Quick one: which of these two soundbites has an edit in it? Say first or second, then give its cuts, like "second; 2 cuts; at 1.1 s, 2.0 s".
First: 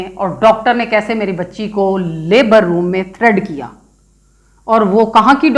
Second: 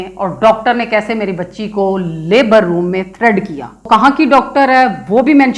second; 1 cut; at 3.9 s